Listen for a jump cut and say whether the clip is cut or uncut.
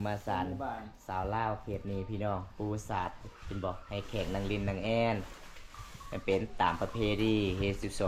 uncut